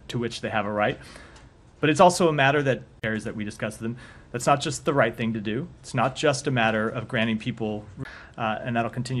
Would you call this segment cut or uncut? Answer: uncut